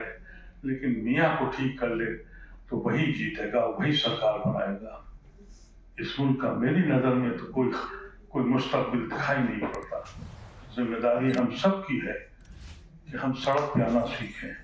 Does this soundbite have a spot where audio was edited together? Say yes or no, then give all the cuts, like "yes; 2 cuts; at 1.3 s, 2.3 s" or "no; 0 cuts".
no; 0 cuts